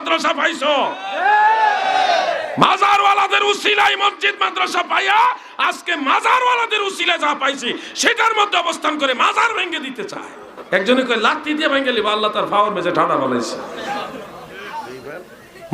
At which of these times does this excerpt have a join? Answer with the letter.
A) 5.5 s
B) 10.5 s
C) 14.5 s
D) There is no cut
B